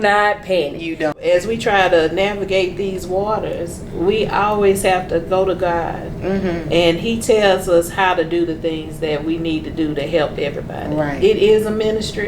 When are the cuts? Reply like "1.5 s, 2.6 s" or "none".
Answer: 1.2 s